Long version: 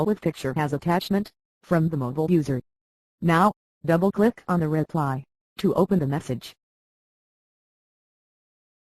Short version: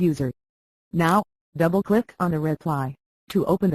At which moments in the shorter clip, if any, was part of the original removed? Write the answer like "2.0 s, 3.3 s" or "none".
none